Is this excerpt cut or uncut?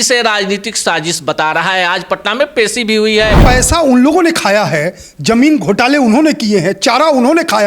cut